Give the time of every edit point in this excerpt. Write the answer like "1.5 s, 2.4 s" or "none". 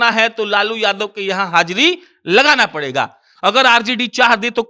3.2 s